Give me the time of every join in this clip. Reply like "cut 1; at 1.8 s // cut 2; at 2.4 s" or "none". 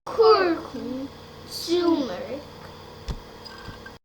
cut 1; at 2.6 s